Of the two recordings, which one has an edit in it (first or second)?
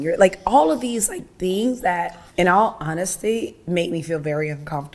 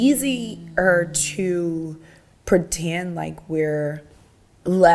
first